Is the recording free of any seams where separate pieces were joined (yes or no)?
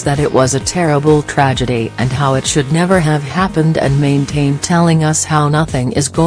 yes